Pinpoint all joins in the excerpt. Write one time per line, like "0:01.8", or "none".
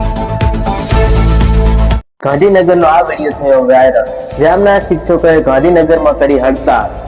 0:02.0